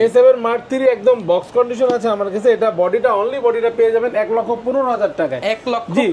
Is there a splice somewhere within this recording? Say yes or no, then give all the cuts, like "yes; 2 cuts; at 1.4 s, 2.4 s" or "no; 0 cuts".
no; 0 cuts